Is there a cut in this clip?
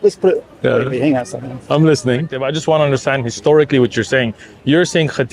yes; 1 cut; at 2.4 s

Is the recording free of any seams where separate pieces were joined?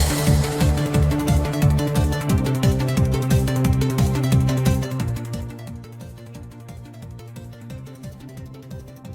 yes; 0 cuts

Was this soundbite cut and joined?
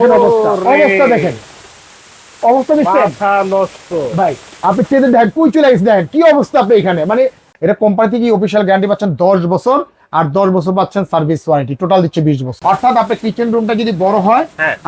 yes; 2 cuts; at 7.5 s, 12.6 s

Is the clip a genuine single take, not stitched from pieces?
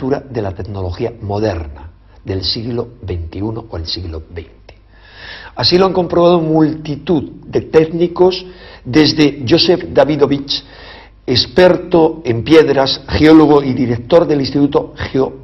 no; 1 cut; at 2.6 s

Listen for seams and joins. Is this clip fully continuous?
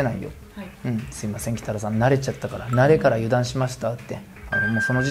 yes; 0 cuts

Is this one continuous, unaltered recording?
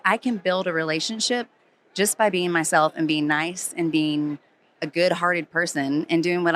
yes; 0 cuts

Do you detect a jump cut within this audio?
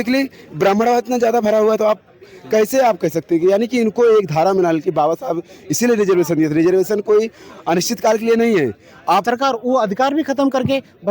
yes; 1 cut; at 9.2 s

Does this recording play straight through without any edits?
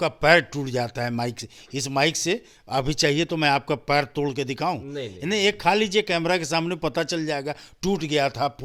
yes; 0 cuts

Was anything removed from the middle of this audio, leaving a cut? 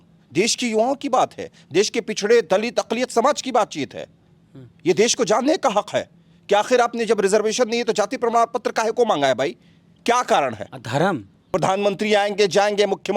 yes; 1 cut; at 11.4 s

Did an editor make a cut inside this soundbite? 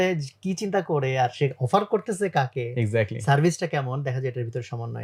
no; 0 cuts

